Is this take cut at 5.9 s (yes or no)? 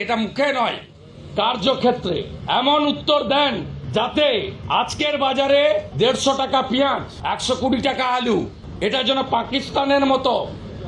yes